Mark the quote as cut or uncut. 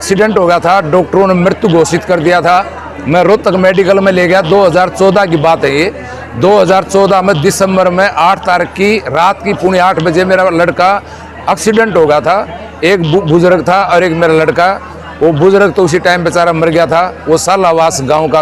uncut